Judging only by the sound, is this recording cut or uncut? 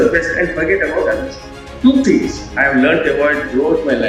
cut